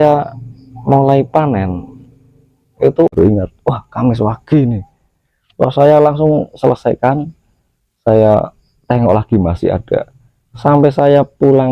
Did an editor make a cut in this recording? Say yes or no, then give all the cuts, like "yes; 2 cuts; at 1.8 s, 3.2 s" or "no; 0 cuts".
yes; 1 cut; at 3.1 s